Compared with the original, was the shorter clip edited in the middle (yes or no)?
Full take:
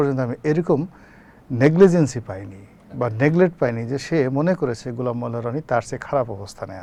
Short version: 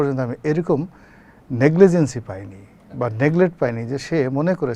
no